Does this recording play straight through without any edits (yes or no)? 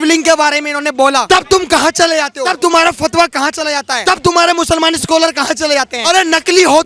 no